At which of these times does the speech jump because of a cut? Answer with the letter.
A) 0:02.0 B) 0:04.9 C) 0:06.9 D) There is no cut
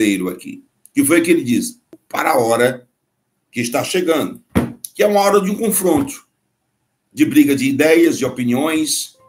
A